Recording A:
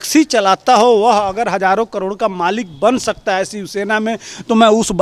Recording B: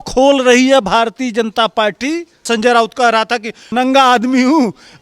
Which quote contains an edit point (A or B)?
B